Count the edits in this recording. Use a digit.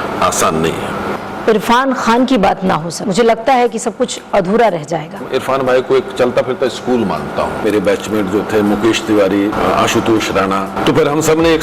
6